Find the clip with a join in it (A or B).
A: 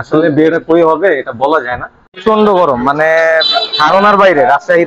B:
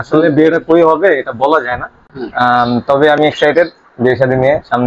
A